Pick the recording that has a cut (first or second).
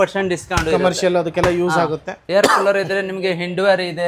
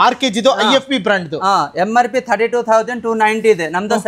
first